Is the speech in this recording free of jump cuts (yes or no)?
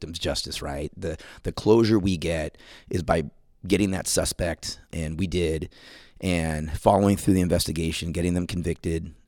no